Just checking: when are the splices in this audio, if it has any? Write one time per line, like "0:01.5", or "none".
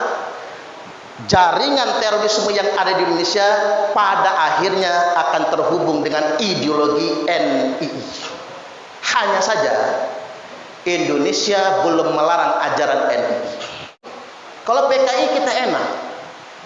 0:14.1